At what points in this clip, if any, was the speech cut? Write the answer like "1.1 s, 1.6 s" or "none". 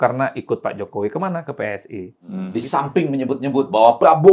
2.4 s